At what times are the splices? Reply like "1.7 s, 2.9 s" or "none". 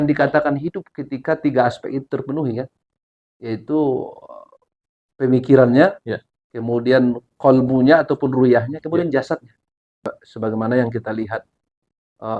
10.1 s

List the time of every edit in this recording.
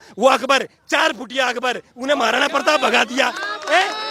none

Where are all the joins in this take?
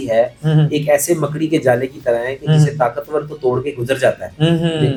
none

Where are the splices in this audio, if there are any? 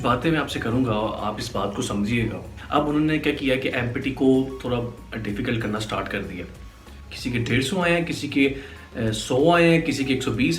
2.5 s, 6.7 s

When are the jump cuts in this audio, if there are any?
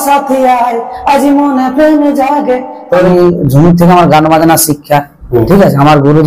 3.1 s

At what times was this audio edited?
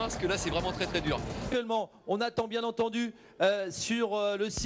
1.5 s

